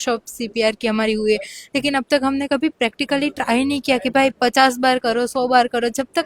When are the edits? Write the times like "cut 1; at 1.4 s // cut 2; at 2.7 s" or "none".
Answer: none